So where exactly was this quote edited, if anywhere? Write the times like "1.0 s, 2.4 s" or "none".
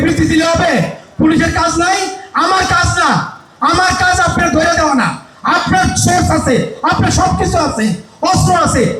none